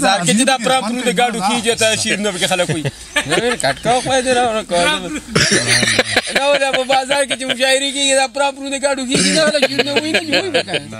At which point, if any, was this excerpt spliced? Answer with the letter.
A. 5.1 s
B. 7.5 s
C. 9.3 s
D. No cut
D